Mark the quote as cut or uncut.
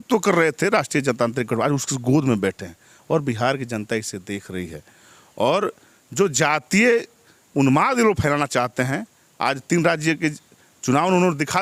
uncut